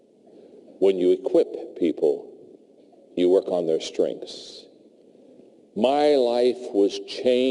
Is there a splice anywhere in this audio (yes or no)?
no